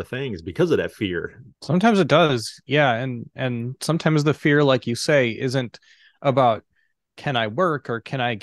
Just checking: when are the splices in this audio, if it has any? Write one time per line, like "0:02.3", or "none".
none